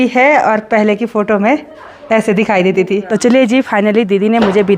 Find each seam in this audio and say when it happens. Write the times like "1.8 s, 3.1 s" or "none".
3.1 s